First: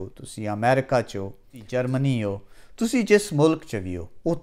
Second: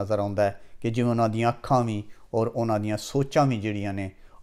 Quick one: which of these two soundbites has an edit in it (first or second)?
first